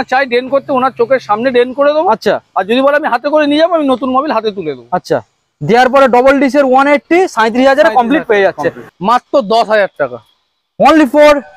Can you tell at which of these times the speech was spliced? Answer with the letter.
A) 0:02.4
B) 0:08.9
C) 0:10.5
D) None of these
B